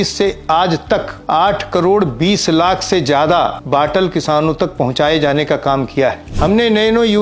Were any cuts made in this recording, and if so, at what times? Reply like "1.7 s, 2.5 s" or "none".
1.1 s, 3.6 s, 6.3 s